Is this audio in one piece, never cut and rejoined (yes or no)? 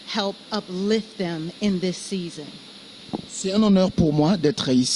yes